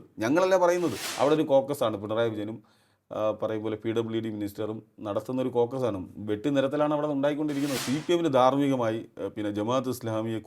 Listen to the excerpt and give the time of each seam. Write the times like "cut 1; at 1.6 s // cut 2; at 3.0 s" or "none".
cut 1; at 1.0 s // cut 2; at 7.8 s